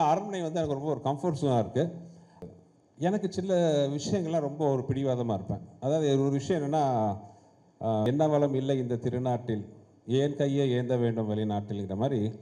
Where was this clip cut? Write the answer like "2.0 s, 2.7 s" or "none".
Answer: 2.3 s, 8.0 s